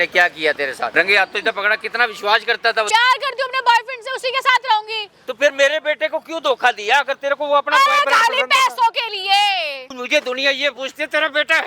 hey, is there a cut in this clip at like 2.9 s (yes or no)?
yes